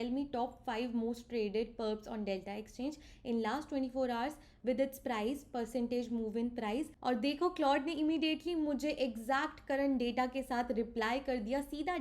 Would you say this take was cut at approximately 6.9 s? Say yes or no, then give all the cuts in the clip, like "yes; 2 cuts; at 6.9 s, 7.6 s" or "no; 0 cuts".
yes; 1 cut; at 6.9 s